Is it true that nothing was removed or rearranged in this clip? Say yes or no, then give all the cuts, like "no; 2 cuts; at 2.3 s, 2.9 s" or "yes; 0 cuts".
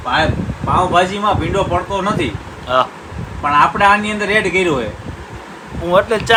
yes; 0 cuts